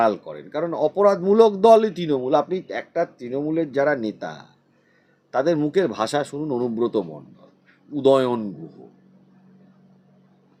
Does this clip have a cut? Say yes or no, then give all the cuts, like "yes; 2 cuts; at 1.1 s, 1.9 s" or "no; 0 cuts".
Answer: no; 0 cuts